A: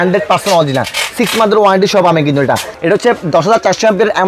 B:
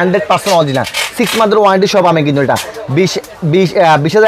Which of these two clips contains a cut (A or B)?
A